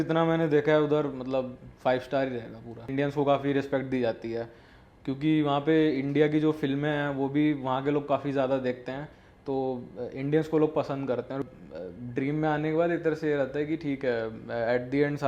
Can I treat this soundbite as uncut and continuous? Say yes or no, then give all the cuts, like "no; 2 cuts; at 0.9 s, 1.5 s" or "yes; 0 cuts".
no; 2 cuts; at 2.9 s, 11.4 s